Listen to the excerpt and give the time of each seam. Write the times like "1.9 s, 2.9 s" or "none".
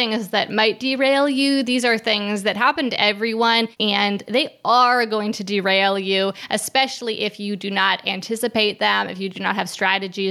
3.7 s